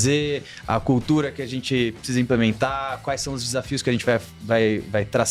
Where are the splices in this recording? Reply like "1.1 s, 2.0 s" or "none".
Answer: none